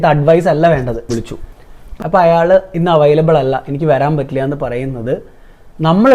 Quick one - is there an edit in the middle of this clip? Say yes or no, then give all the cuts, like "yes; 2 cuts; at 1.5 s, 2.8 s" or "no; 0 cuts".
yes; 1 cut; at 1.1 s